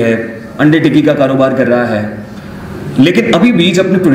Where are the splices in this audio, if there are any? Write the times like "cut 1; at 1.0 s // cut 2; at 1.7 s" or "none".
none